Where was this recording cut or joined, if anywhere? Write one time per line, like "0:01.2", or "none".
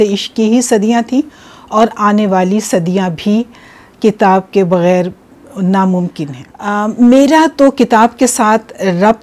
none